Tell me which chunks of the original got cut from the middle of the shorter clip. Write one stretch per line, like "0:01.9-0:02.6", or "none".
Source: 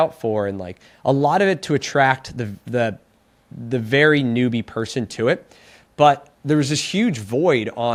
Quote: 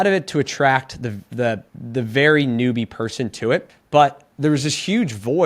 0:03.1-0:03.5
0:05.5-0:05.8

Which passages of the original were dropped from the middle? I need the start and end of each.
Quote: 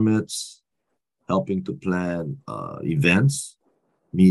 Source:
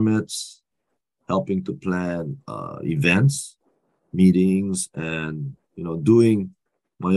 none

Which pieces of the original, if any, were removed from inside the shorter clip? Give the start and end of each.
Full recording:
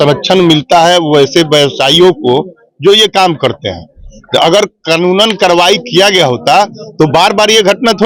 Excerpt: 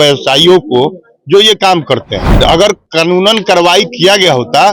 0:03.7-0:04.1

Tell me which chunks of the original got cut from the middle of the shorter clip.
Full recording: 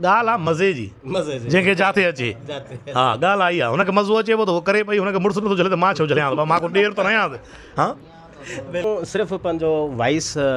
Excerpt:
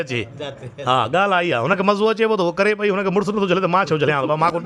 none

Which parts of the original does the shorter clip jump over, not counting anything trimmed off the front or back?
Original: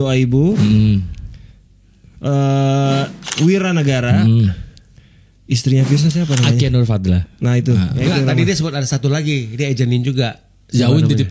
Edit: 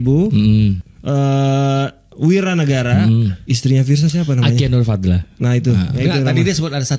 0:01.2-0:02.1
0:04.6-0:05.4

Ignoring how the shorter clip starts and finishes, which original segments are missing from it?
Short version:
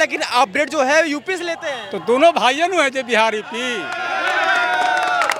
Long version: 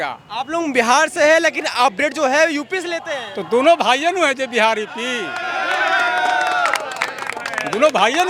none

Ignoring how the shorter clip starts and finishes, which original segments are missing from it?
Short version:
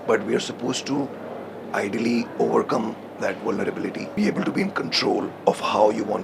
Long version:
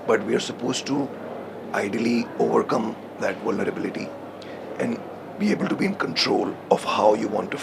0:04.1-0:05.3

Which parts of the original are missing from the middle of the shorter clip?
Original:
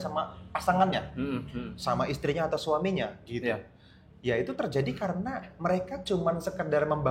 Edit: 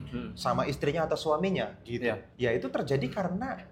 0:03.7-0:04.1

